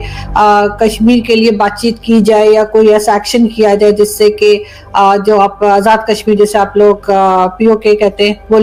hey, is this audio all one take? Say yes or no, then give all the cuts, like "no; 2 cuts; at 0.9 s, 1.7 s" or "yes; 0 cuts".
yes; 0 cuts